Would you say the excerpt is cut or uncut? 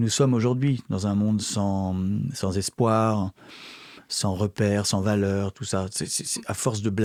uncut